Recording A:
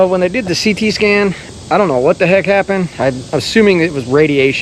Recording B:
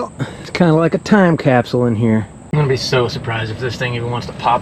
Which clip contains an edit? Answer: B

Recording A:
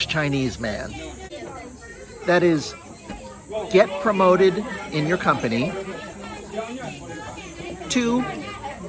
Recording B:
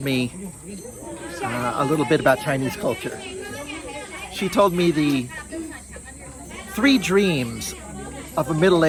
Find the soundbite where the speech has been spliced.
A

